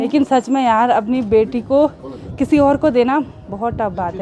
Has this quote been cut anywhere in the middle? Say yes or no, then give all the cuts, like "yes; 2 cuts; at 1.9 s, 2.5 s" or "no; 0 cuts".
no; 0 cuts